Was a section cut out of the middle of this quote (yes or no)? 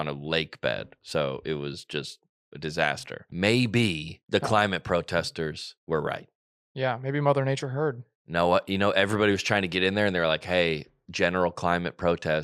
yes